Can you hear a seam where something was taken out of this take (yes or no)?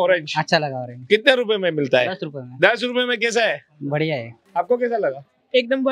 yes